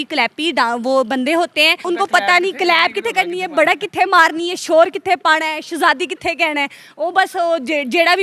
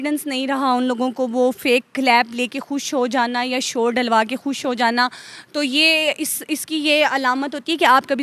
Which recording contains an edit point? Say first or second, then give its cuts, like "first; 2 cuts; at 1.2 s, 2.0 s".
first; 1 cut; at 1.9 s